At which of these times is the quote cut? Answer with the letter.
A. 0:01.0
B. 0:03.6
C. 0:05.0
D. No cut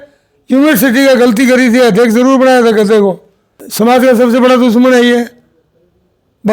B